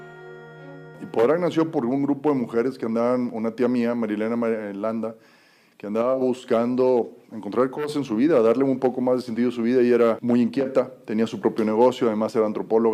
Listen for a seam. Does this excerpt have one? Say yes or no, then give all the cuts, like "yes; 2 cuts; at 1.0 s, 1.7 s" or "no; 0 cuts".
yes; 1 cut; at 5.0 s